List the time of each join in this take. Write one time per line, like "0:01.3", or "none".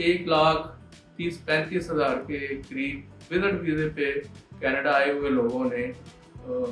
none